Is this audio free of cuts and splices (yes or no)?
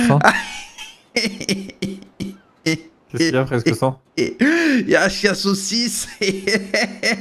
yes